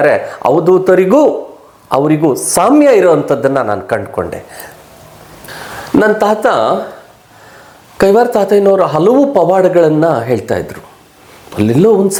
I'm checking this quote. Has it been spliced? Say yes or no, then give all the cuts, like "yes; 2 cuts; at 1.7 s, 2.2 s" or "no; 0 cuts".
no; 0 cuts